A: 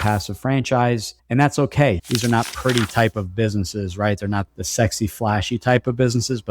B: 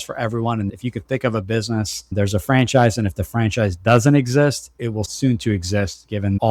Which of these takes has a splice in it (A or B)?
A